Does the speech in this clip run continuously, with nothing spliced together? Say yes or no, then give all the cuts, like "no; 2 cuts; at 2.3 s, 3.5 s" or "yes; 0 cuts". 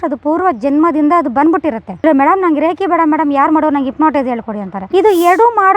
no; 1 cut; at 1.9 s